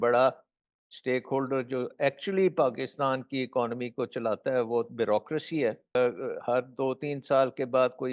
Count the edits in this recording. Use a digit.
1